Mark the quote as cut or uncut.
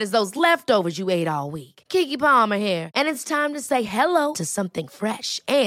uncut